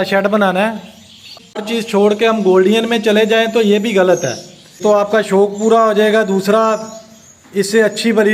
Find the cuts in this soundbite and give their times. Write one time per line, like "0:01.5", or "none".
0:01.4
0:04.8